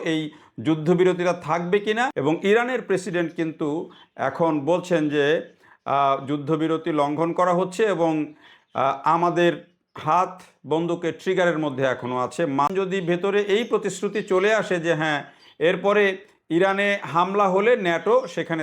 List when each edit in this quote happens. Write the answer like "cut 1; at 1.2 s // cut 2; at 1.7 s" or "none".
cut 1; at 2.1 s // cut 2; at 12.7 s